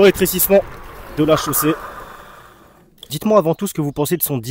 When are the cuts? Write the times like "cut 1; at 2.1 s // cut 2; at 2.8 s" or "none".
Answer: cut 1; at 3.1 s